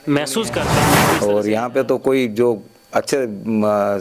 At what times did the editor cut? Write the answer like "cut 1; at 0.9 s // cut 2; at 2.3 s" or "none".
cut 1; at 1.1 s

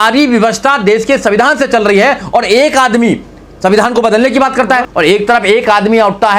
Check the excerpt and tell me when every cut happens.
cut 1; at 4.9 s

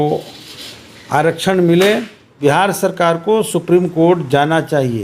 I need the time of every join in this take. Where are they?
cut 1; at 2.3 s

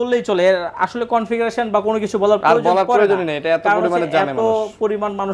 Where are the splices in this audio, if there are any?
none

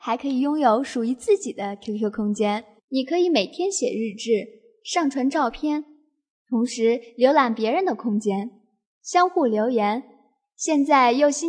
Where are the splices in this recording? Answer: cut 1; at 2.7 s

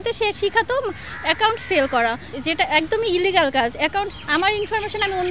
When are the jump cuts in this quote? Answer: cut 1; at 2.3 s

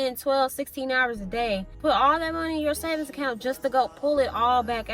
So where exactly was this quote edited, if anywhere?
cut 1; at 1.7 s

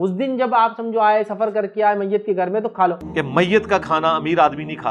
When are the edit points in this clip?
cut 1; at 3.0 s

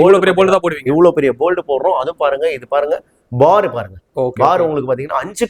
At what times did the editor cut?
none

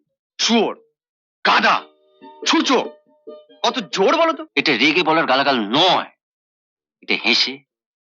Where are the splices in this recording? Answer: cut 1; at 4.5 s

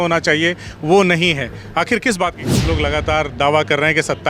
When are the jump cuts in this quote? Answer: cut 1; at 2.7 s

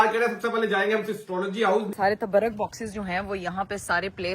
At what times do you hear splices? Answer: cut 1; at 1.9 s

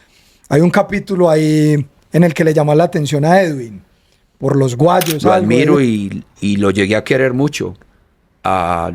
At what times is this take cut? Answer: cut 1; at 5.3 s

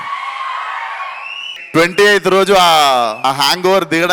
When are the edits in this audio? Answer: cut 1; at 1.4 s // cut 2; at 3.2 s

